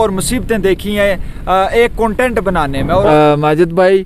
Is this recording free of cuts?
no; 1 cut; at 3.1 s

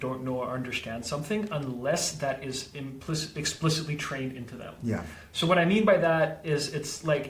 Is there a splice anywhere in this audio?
no; 0 cuts

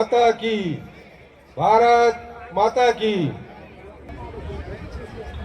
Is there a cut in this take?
yes; 1 cut; at 4.1 s

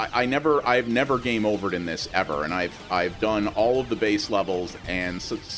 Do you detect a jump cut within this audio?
no; 0 cuts

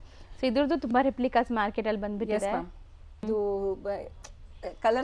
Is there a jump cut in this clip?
yes; 1 cut; at 3.2 s

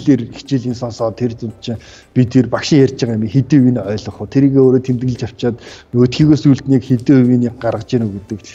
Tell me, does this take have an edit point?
no; 0 cuts

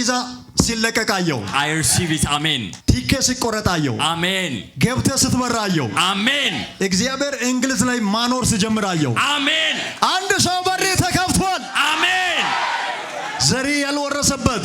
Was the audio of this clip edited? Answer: no; 0 cuts

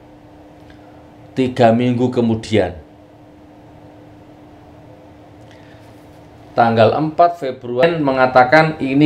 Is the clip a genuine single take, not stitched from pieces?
no; 1 cut; at 7.8 s

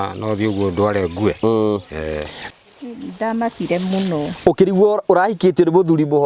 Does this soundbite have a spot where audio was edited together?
yes; 1 cut; at 2.4 s

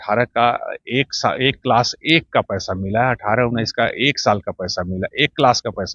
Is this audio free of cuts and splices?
yes; 0 cuts

